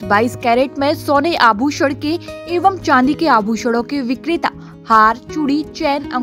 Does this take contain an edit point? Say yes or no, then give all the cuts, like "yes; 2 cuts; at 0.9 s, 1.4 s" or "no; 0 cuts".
no; 0 cuts